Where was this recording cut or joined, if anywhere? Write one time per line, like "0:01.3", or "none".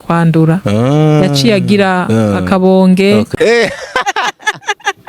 0:03.3